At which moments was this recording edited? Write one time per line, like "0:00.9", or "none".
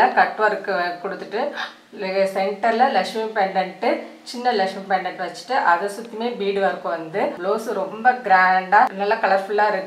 0:07.4
0:08.9